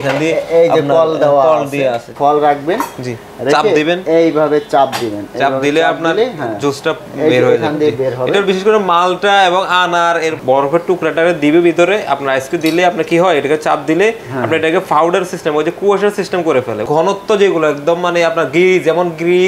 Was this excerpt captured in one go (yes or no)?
no